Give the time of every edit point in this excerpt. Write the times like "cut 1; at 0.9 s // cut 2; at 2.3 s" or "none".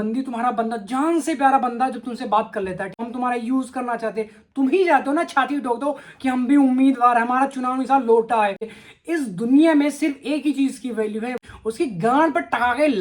cut 1; at 3.0 s // cut 2; at 8.6 s // cut 3; at 11.4 s